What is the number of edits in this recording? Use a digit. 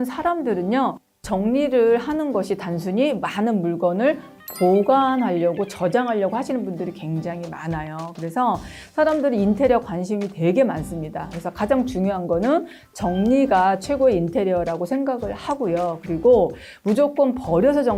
0